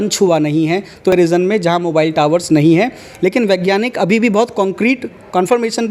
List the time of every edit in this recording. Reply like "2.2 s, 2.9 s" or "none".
1.1 s